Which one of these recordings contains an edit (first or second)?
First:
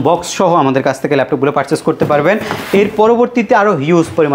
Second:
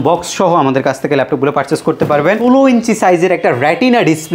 second